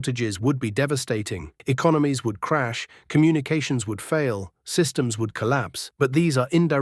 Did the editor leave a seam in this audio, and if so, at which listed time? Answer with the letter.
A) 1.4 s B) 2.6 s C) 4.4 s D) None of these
D